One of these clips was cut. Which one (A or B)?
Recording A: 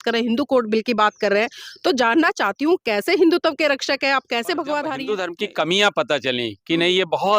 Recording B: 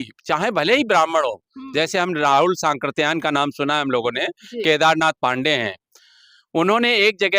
A